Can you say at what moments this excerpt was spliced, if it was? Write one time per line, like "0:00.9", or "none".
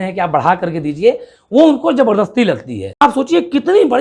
0:03.0